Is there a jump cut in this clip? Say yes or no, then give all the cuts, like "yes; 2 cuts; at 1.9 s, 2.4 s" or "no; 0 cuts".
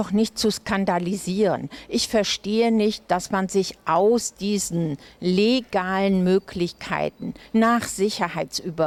no; 0 cuts